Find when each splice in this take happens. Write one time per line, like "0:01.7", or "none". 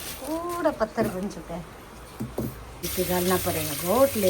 0:02.9